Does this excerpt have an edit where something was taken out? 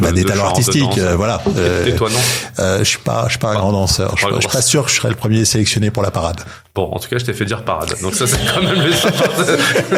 no; 0 cuts

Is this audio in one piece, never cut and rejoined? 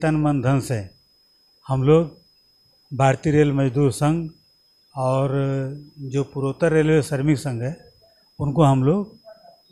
yes; 0 cuts

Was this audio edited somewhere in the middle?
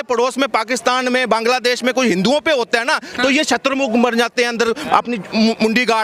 no; 0 cuts

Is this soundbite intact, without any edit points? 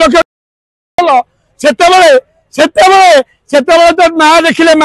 yes; 0 cuts

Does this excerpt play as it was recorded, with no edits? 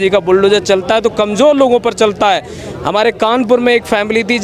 yes; 0 cuts

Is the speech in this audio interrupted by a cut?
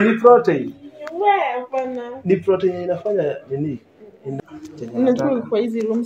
yes; 1 cut; at 4.5 s

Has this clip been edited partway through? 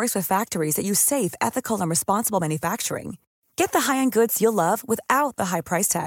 no; 0 cuts

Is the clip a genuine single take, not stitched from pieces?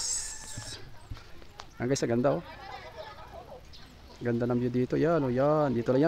yes; 0 cuts

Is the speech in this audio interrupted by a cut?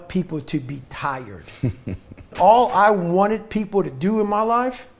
yes; 1 cut; at 2.3 s

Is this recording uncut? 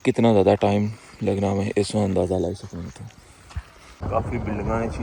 no; 1 cut; at 4.0 s

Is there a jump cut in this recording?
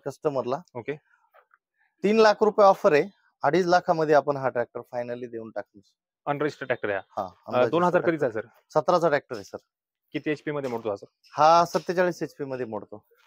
no; 0 cuts

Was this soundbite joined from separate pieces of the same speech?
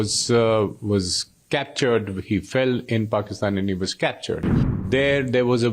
yes; 1 cut; at 4.8 s

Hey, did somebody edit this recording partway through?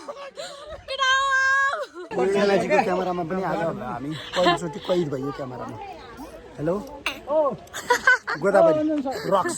yes; 1 cut; at 2.1 s

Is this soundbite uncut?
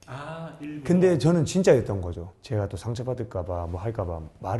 no; 1 cut; at 2.3 s

